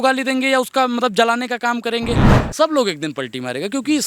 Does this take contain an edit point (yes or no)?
yes